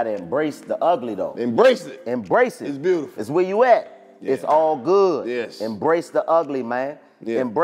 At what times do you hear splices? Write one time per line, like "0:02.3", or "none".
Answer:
none